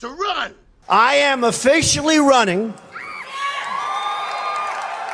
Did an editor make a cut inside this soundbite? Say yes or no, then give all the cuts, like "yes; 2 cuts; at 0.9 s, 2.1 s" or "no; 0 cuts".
yes; 1 cut; at 1.1 s